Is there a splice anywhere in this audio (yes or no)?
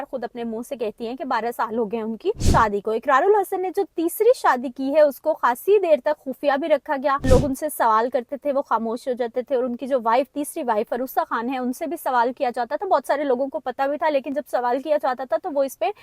yes